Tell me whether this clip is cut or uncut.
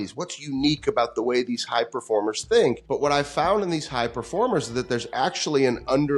cut